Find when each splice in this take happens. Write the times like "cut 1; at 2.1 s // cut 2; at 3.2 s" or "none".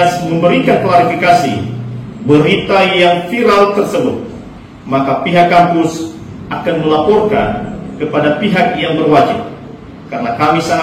none